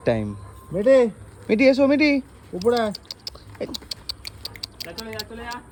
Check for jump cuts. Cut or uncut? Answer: uncut